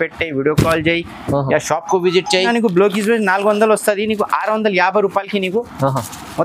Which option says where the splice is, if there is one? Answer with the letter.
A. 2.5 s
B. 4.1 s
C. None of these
A